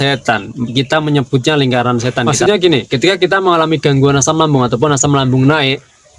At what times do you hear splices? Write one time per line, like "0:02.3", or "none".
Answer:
0:02.1